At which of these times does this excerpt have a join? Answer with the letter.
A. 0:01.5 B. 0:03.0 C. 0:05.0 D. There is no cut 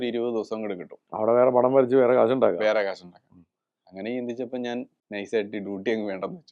C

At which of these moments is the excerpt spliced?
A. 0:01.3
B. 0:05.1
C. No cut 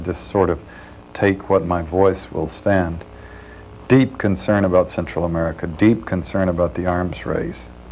B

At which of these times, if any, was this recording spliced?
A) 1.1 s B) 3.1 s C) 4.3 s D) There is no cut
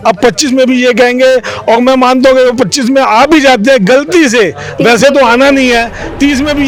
D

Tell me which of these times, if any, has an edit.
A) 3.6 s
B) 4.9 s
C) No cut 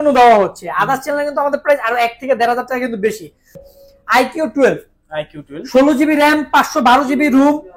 A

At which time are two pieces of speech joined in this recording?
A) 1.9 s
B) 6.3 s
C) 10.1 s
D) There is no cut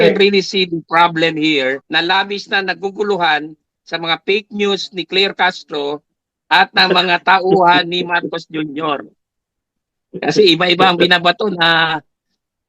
A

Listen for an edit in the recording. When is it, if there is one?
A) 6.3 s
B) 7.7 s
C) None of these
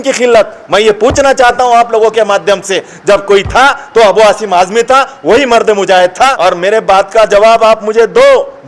A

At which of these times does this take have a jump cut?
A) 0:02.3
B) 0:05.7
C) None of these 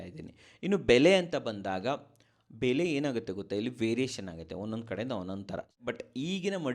B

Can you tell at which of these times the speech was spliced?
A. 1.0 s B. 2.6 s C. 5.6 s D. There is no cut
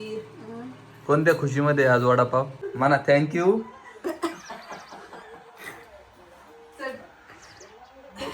B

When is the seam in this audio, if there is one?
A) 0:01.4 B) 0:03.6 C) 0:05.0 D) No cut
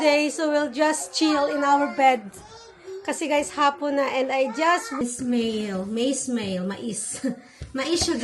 C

